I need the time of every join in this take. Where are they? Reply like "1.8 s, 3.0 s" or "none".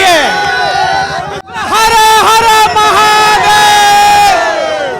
1.4 s